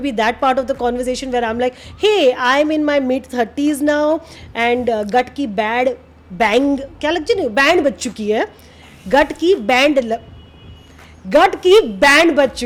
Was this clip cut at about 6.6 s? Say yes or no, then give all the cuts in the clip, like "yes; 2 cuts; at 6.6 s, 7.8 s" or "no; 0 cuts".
no; 0 cuts